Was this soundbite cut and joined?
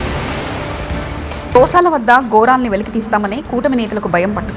yes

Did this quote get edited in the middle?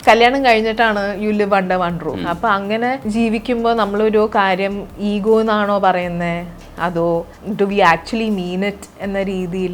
yes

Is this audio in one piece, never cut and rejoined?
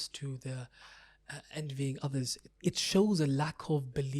no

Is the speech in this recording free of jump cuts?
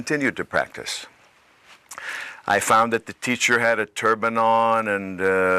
no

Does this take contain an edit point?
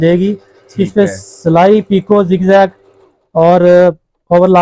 no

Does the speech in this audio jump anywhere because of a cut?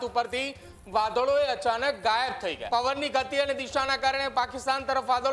yes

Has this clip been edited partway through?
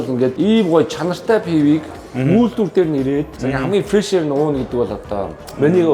no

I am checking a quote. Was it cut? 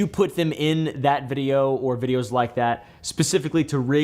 no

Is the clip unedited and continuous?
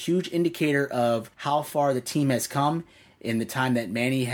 no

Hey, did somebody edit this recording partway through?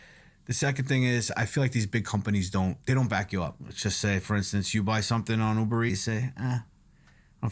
yes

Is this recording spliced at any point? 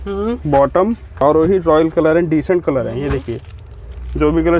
yes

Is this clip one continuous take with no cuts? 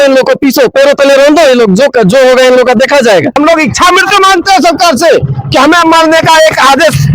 no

